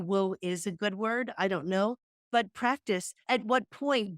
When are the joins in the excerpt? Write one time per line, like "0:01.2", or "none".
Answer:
0:02.1
0:03.2